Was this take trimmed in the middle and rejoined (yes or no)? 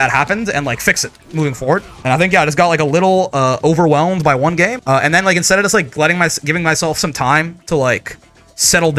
yes